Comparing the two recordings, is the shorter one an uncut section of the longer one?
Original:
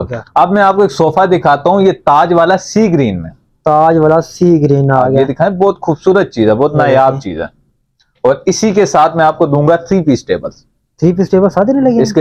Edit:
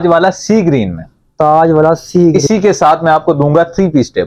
no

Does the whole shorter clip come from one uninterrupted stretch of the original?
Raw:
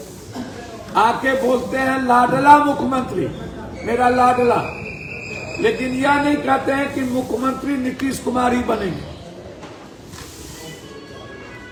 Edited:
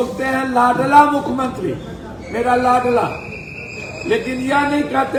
yes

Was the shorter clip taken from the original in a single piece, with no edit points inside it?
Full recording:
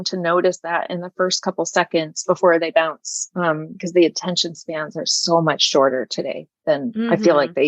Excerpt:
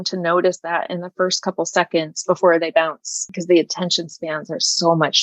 no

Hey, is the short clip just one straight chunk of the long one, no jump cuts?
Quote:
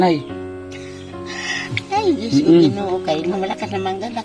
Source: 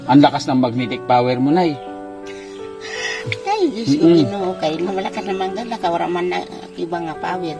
yes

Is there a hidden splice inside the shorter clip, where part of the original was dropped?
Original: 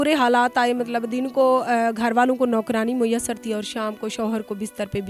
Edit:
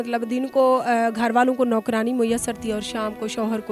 no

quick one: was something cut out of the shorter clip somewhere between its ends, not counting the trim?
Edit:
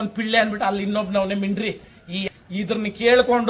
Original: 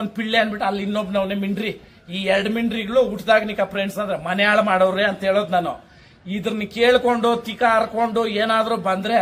yes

